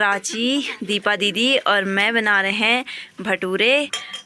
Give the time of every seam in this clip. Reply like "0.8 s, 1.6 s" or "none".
none